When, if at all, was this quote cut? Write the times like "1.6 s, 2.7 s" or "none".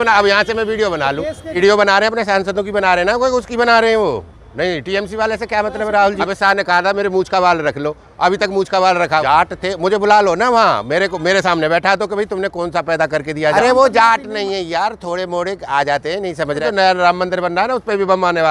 1.6 s, 6.2 s, 9.6 s, 13.6 s, 16.7 s